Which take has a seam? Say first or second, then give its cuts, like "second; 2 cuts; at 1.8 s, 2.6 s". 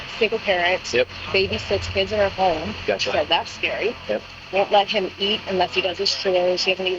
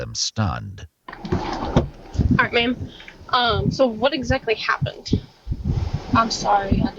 first; 2 cuts; at 1.2 s, 4.4 s